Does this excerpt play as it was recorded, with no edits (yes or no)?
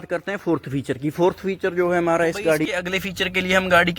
no